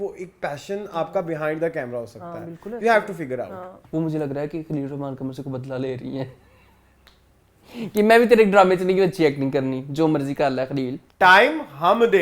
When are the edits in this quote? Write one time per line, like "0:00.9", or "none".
0:03.7
0:11.0

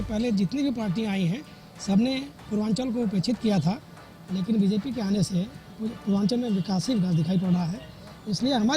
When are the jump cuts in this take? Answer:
none

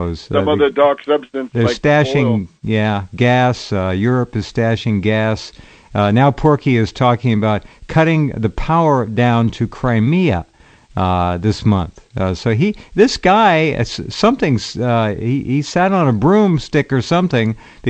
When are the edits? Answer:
0:04.1

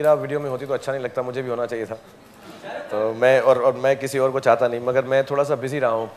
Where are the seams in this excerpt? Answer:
none

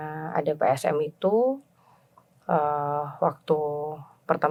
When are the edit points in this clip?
none

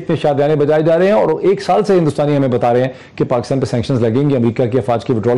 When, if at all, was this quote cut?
none

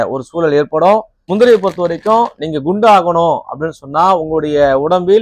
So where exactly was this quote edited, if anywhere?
0:01.2

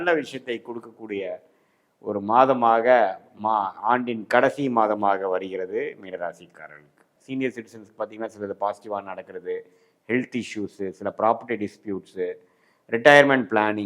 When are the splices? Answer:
0:07.1

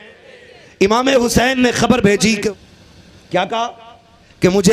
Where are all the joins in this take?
0:02.5

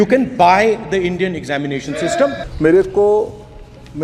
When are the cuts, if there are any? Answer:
0:02.4

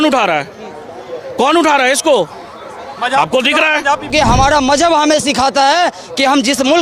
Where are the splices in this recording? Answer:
0:04.1

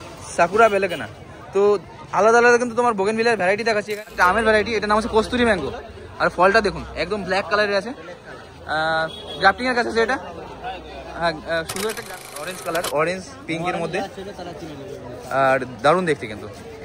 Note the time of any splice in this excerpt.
0:04.0
0:12.0

